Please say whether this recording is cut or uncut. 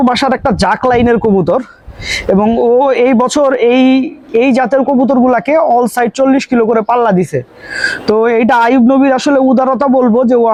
uncut